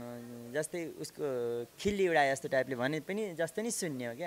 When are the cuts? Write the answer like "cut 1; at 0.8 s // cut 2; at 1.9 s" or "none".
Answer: none